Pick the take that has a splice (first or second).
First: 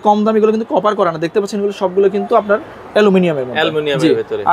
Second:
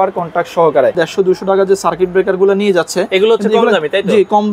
second